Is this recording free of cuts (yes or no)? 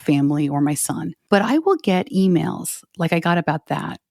no